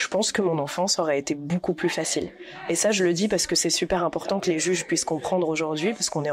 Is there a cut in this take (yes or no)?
no